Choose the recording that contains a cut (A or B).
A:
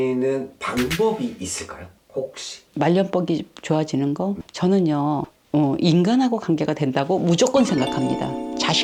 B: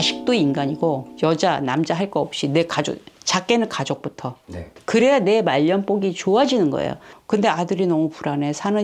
B